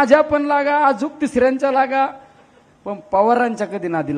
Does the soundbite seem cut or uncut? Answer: uncut